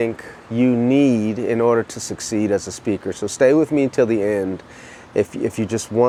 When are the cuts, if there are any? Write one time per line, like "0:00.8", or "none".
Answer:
none